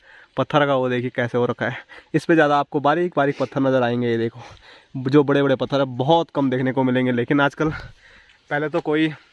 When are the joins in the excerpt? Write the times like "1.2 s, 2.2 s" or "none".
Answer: none